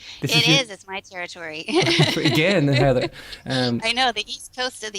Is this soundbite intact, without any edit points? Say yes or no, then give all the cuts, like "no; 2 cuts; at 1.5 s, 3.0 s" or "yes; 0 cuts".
no; 1 cut; at 3.6 s